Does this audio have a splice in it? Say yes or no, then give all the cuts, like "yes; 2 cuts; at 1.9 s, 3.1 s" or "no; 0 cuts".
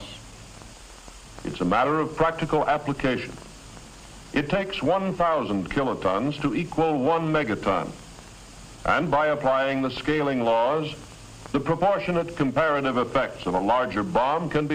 yes; 1 cut; at 4.5 s